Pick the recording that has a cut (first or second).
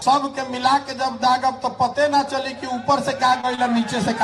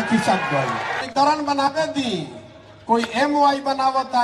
second